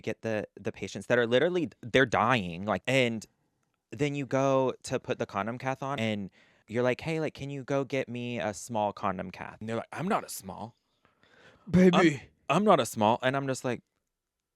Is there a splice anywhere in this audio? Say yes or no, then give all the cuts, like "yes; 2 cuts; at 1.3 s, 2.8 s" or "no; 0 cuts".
yes; 3 cuts; at 2.8 s, 5.9 s, 9.6 s